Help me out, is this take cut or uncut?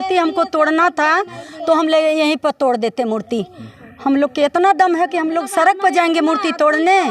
uncut